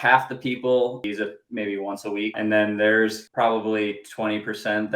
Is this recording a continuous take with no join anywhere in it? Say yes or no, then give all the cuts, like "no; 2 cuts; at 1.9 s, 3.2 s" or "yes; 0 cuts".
no; 3 cuts; at 1.0 s, 2.4 s, 3.2 s